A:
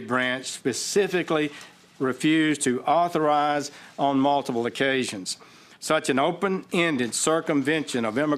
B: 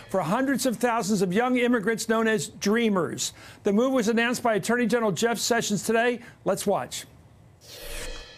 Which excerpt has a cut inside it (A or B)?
A